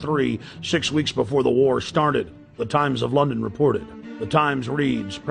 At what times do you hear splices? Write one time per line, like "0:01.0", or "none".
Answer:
0:04.4